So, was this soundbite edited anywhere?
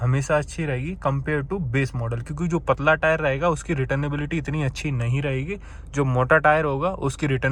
no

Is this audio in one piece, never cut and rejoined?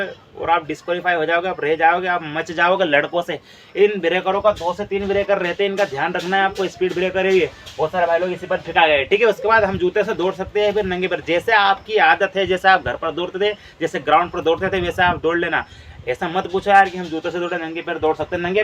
yes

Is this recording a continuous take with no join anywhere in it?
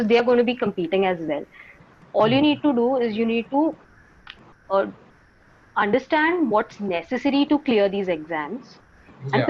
yes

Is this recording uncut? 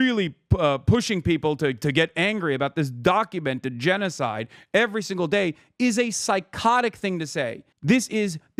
no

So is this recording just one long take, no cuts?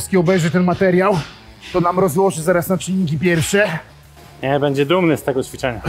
yes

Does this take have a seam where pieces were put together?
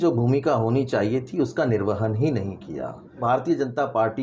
yes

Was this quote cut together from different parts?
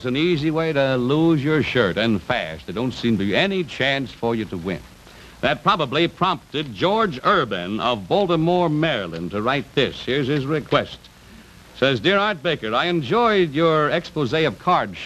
no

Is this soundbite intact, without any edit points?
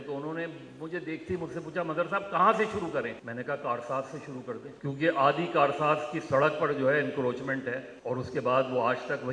no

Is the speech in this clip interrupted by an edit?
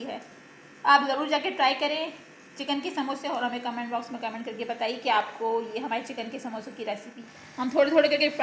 yes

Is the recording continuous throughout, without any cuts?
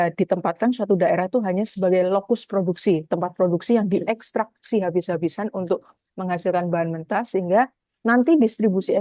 yes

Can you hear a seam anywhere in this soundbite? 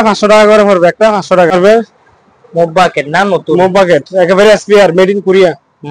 yes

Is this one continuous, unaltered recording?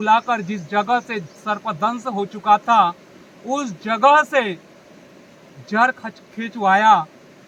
yes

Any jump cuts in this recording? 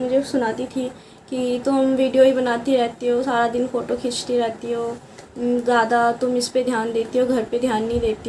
no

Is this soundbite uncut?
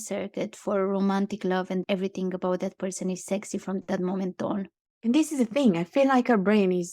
yes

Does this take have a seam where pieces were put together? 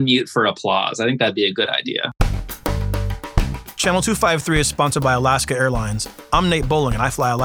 yes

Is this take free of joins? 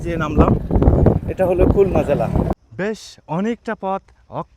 no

